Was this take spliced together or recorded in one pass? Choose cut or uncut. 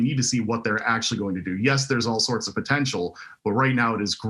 uncut